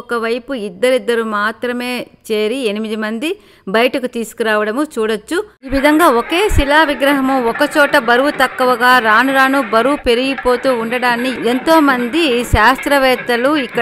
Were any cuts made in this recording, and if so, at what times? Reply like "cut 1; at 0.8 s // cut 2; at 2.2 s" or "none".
cut 1; at 5.7 s